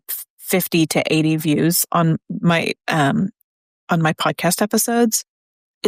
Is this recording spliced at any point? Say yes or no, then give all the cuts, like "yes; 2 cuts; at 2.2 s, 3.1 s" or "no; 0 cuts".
no; 0 cuts